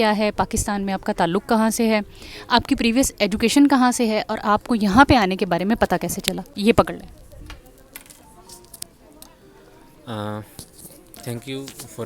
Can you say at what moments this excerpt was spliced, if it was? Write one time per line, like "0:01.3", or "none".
none